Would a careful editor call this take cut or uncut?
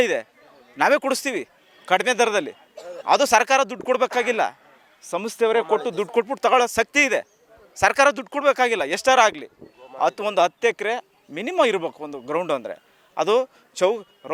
uncut